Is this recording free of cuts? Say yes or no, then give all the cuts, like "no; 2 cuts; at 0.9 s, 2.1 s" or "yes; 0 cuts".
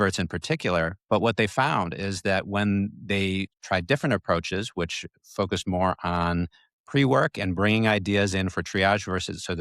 no; 1 cut; at 1.0 s